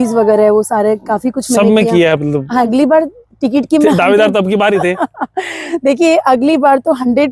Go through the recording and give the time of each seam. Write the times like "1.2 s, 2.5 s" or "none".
2.7 s